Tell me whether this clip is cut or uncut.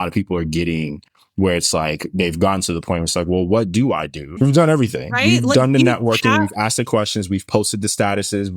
cut